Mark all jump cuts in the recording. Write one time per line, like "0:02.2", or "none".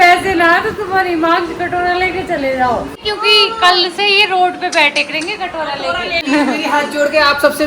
0:03.1
0:06.3